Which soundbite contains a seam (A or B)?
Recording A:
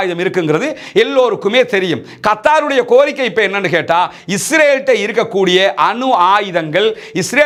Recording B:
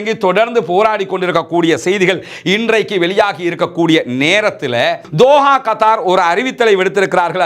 B